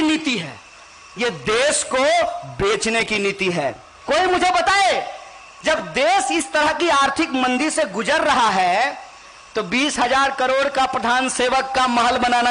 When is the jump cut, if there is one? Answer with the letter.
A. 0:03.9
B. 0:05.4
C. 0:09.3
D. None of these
A